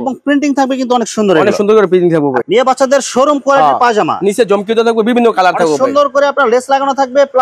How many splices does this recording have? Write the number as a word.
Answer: one